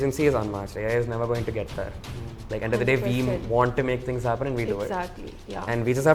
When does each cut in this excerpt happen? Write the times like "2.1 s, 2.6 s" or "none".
none